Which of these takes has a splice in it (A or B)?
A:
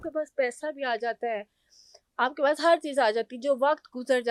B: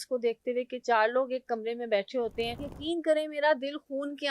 B